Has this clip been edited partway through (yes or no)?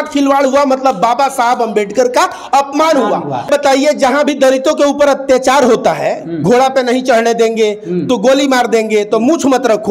yes